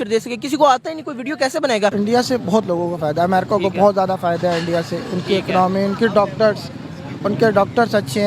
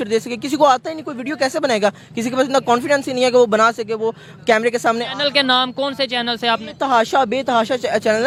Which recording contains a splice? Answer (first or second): first